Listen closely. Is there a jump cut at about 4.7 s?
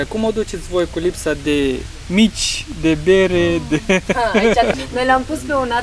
yes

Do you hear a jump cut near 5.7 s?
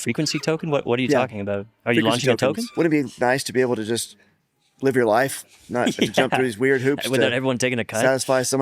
no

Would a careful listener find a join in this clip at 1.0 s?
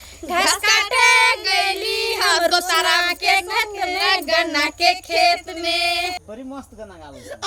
no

